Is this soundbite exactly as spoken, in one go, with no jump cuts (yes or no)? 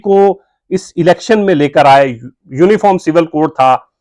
yes